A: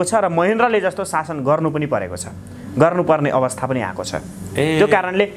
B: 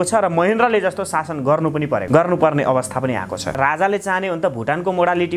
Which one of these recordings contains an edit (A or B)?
B